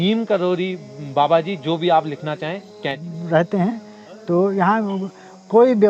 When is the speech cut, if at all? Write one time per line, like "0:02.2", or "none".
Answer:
0:03.0